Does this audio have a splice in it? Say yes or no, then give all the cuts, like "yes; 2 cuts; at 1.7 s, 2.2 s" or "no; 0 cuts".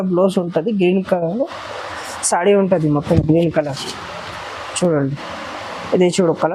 no; 0 cuts